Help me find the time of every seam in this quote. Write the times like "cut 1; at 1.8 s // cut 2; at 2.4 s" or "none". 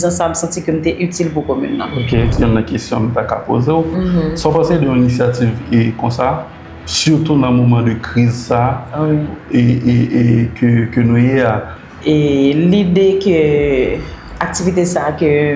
cut 1; at 2.3 s // cut 2; at 11.7 s